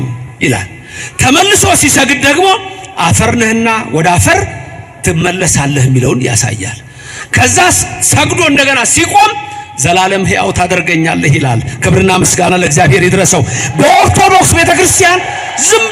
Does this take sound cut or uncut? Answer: uncut